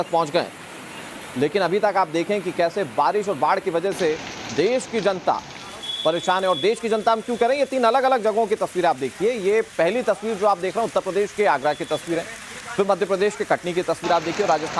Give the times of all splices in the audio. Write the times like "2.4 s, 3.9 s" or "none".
none